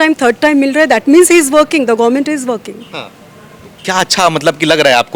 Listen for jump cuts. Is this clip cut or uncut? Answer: uncut